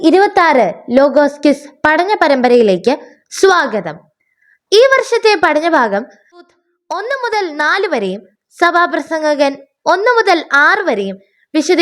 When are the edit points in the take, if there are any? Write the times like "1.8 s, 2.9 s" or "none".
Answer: 6.5 s

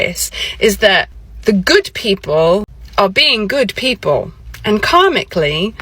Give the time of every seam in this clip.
1.2 s, 2.8 s, 4.4 s

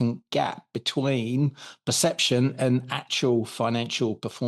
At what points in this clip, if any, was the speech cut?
none

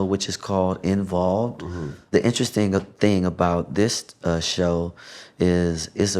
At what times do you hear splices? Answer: 2.0 s

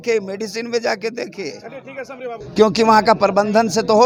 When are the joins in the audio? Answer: none

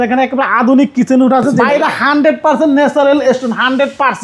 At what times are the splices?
1.6 s

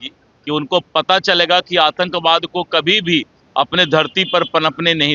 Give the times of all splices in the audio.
none

